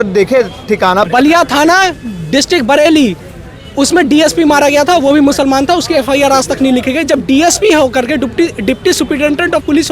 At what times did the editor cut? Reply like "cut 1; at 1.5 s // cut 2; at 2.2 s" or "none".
cut 1; at 1.1 s